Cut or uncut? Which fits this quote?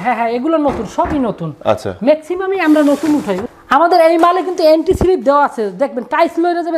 cut